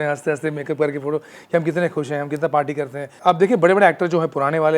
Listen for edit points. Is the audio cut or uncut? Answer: cut